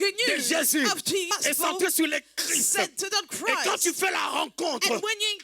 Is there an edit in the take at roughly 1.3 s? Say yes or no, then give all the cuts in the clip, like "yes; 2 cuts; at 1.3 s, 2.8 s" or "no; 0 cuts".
yes; 1 cut; at 1.3 s